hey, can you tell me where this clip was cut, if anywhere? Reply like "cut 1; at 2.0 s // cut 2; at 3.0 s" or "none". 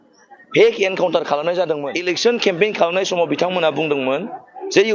cut 1; at 2.2 s